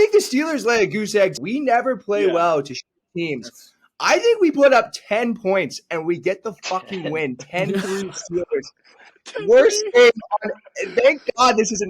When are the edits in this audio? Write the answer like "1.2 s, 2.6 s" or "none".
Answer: 1.4 s